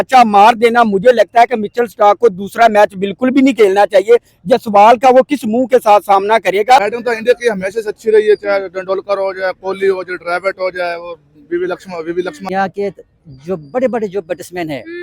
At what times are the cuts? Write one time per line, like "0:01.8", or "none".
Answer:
0:06.9
0:12.5